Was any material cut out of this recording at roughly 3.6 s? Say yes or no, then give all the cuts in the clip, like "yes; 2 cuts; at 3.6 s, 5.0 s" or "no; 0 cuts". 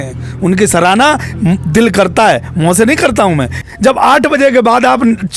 yes; 1 cut; at 3.6 s